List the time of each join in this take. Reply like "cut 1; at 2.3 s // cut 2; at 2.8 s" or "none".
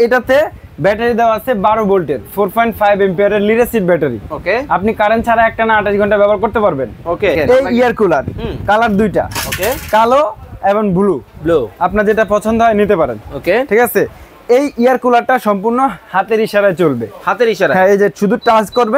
cut 1; at 7.4 s